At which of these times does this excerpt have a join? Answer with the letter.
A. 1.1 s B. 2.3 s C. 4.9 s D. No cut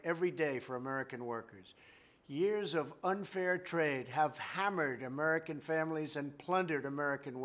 D